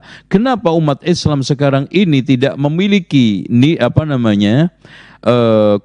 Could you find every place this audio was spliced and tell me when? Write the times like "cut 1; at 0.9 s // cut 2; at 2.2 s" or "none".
none